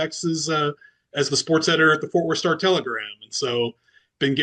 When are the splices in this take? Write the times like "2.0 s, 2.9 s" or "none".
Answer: none